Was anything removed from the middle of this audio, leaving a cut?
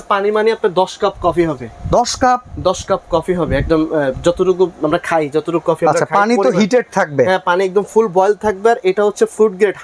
no; 0 cuts

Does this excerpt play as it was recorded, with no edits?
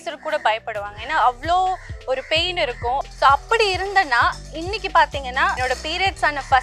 no; 2 cuts; at 3.0 s, 5.6 s

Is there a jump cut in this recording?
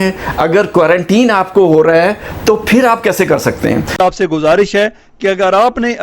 yes; 1 cut; at 3.9 s

